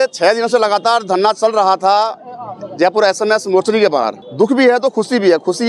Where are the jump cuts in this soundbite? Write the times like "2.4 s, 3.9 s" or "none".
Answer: 4.2 s